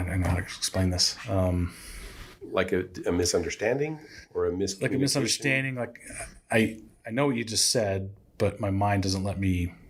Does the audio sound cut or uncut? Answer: uncut